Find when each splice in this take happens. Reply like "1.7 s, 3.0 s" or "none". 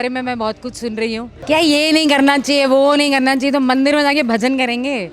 1.3 s